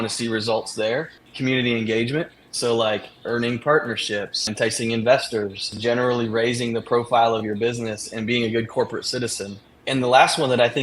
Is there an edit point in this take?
yes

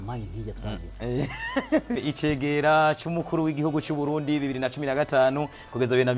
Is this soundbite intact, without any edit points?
no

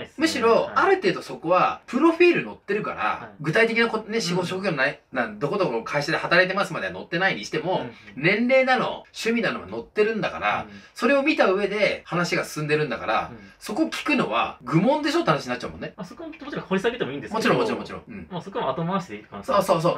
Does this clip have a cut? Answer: no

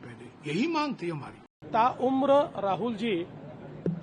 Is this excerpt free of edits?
no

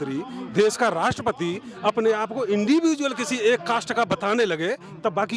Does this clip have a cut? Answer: no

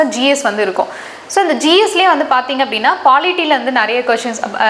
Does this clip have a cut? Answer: no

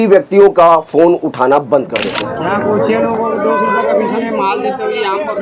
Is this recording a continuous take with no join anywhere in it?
no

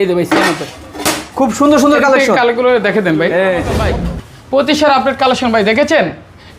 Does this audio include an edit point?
yes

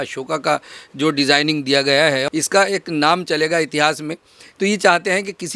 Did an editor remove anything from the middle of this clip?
yes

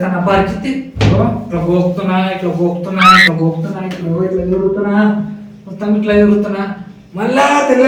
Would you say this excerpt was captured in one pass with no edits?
yes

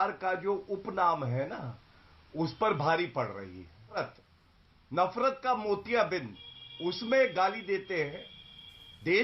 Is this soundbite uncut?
no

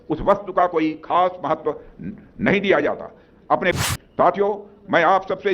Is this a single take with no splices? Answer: no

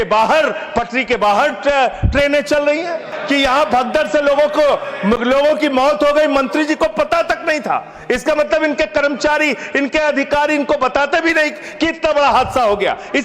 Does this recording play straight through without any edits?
no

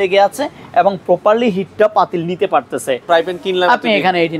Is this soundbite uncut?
no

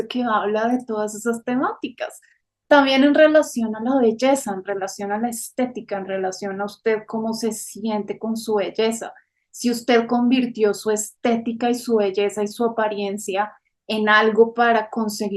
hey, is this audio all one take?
yes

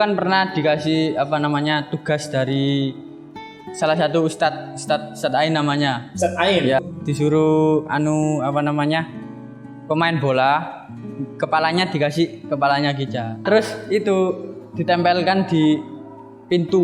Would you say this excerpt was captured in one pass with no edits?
no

